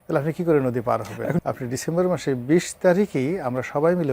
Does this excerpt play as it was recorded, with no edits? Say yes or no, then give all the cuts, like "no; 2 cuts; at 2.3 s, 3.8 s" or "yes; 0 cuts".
no; 1 cut; at 1.4 s